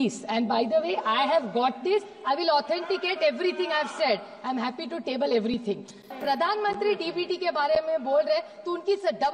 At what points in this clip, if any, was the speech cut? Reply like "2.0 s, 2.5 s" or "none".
6.2 s